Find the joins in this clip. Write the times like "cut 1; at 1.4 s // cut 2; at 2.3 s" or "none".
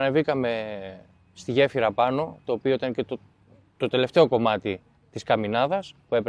none